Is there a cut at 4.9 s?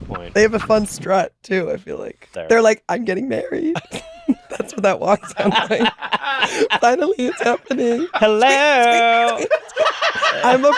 no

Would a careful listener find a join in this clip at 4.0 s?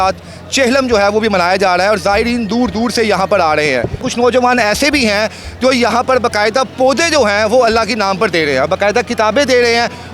yes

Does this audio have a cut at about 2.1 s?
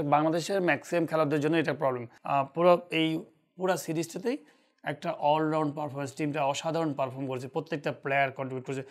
yes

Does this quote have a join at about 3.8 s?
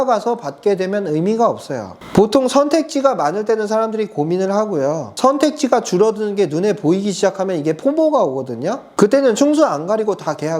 no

